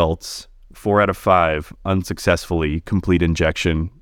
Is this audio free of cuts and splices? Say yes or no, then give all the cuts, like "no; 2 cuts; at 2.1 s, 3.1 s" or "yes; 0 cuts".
yes; 0 cuts